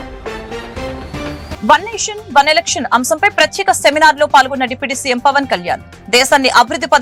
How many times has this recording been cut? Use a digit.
0